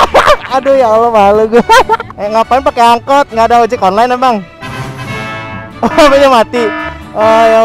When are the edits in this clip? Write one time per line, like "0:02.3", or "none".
0:02.1